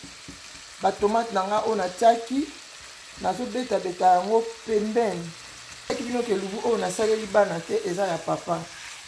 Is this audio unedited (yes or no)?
no